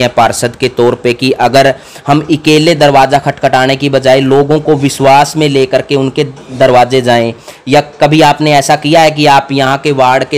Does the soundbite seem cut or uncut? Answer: uncut